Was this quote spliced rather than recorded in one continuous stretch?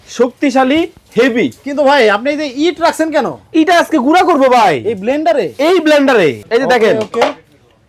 yes; 1 cut; at 6.4 s

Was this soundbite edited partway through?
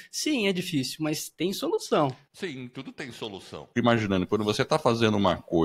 yes; 2 cuts; at 2.3 s, 3.6 s

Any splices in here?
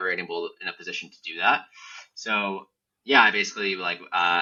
no; 0 cuts

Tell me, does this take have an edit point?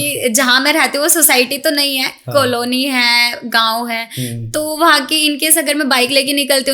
no; 0 cuts

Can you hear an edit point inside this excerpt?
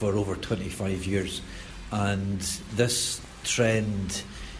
no; 0 cuts

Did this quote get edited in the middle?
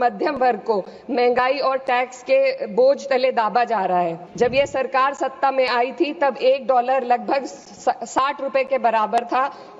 yes; 1 cut; at 4.2 s

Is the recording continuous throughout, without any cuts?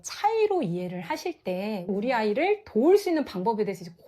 no; 1 cut; at 1.9 s

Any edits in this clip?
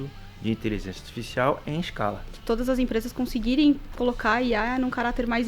yes; 1 cut; at 2.4 s

